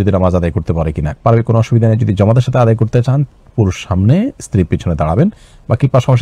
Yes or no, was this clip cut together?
no